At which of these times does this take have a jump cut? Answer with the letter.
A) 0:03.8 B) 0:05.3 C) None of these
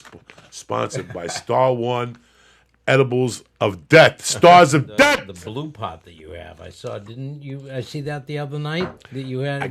B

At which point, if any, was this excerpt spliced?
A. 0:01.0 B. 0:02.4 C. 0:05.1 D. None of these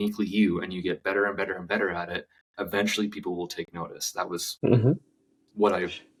D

